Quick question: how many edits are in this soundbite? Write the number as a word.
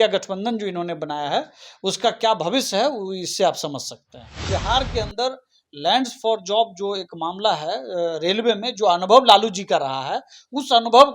one